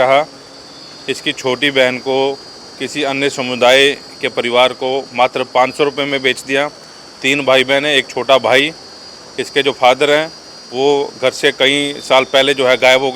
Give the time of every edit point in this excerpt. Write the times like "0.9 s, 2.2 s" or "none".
none